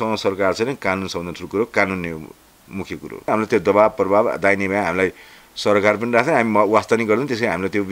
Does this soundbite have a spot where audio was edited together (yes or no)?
yes